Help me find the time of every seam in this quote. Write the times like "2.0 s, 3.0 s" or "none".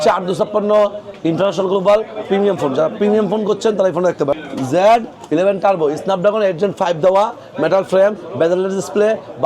1.1 s, 4.4 s